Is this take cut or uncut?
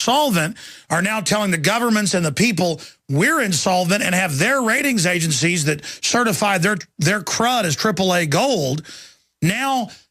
uncut